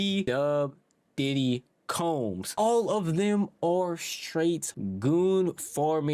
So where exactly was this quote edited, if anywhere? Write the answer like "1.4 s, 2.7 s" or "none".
none